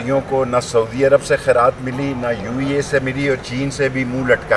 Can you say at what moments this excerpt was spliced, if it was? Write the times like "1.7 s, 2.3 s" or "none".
none